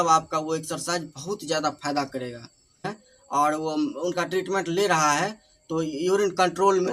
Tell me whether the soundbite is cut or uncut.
cut